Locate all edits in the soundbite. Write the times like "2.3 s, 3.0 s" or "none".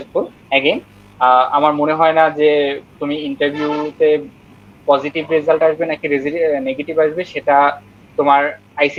none